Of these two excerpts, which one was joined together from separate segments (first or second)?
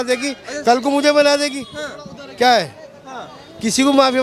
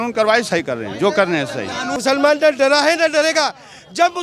second